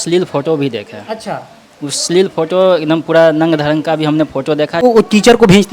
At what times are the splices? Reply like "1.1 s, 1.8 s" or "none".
4.8 s